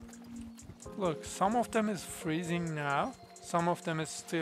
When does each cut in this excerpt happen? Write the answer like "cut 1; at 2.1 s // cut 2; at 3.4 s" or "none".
none